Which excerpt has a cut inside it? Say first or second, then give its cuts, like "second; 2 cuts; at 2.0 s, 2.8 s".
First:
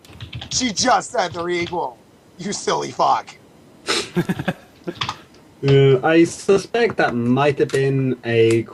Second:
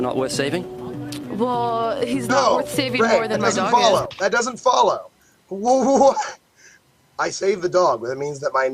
first; 1 cut; at 1.3 s